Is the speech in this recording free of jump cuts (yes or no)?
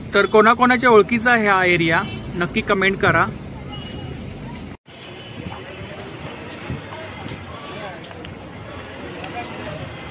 yes